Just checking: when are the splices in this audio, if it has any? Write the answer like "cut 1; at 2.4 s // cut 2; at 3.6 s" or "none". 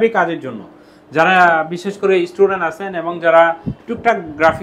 none